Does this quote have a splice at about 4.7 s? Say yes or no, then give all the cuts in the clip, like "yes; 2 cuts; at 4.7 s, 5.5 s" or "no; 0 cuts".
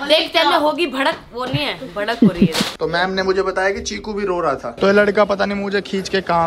yes; 2 cuts; at 2.7 s, 4.7 s